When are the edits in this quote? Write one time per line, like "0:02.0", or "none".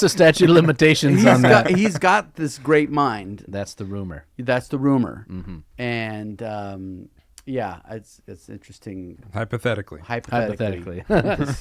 0:03.4